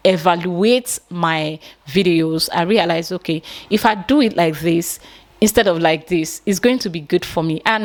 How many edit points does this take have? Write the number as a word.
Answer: zero